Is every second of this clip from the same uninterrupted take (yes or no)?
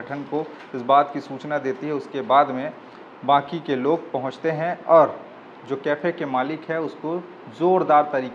yes